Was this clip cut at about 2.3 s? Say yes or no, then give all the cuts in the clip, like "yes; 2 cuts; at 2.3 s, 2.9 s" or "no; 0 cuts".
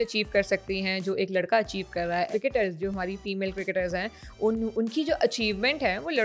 yes; 1 cut; at 2.3 s